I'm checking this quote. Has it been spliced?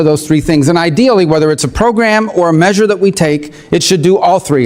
no; 0 cuts

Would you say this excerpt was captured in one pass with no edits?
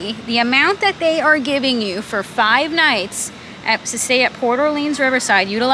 yes; 0 cuts

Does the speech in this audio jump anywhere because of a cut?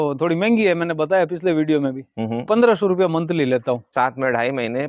yes; 1 cut; at 3.9 s

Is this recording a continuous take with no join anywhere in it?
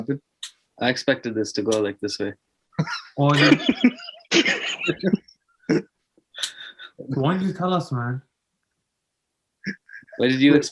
yes; 0 cuts

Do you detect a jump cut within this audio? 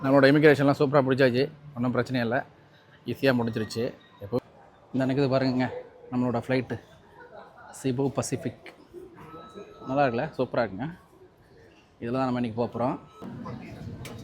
yes; 2 cuts; at 4.4 s, 13.2 s

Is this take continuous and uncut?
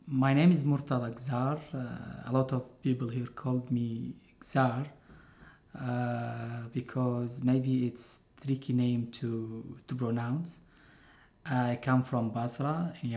no; 1 cut; at 3.9 s

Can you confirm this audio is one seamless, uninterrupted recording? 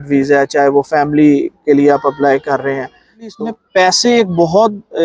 no; 1 cut; at 3.3 s

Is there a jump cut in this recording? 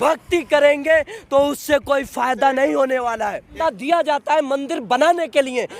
yes; 1 cut; at 3.5 s

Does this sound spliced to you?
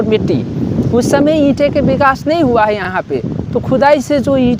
no; 0 cuts

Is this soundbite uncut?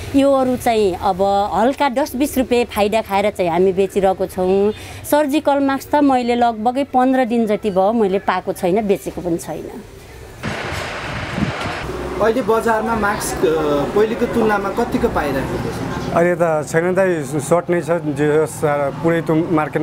yes; 0 cuts

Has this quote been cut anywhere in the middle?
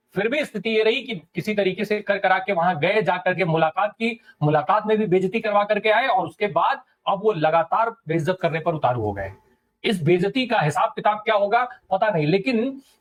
no; 0 cuts

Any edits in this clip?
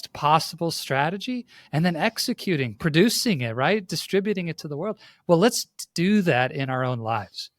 no; 0 cuts

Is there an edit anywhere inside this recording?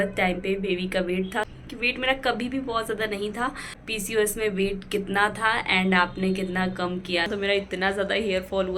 yes; 3 cuts; at 1.6 s, 3.7 s, 7.3 s

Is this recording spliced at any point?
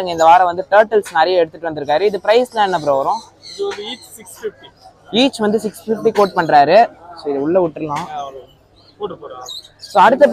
no; 0 cuts

